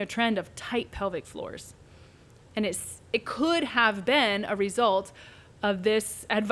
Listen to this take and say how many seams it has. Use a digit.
0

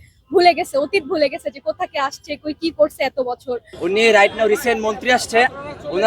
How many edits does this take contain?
1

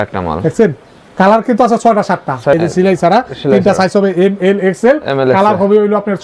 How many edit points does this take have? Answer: 1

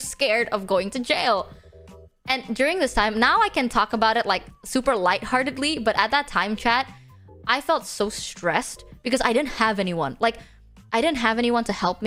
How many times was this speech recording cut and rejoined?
0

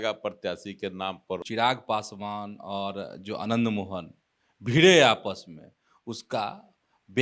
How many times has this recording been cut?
1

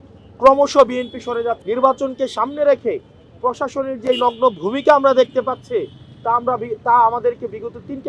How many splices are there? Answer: 1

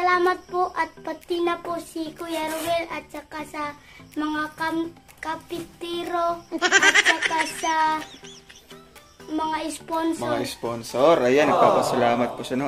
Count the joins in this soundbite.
0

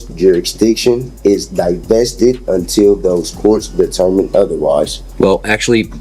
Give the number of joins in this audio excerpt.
1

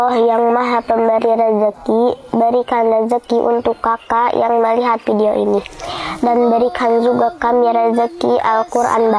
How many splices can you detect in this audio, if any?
0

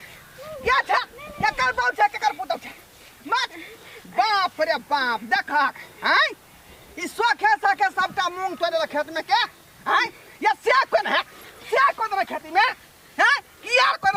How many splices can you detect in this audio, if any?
0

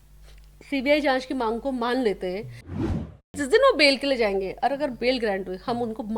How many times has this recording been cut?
1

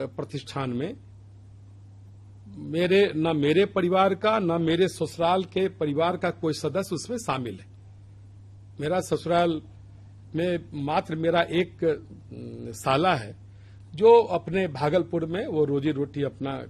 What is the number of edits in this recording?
0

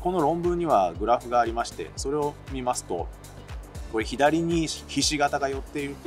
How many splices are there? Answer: 0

